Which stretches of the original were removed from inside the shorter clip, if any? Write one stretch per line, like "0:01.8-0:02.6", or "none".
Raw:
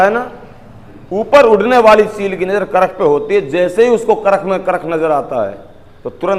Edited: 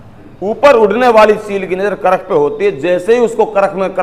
none